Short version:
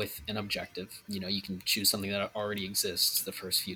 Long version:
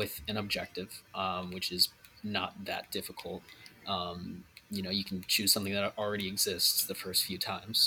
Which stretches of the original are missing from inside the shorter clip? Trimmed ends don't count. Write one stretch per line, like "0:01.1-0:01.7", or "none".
0:01.0-0:04.6